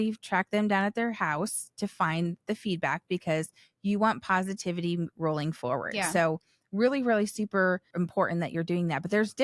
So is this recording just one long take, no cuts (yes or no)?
no